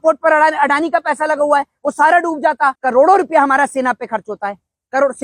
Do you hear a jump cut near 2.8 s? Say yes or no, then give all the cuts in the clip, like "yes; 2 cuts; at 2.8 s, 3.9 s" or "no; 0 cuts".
yes; 1 cut; at 2.8 s